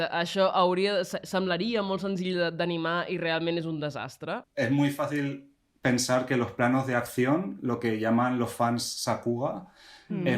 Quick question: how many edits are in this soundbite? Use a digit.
1